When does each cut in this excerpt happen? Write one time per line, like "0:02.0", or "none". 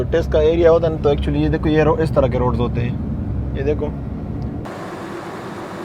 0:04.6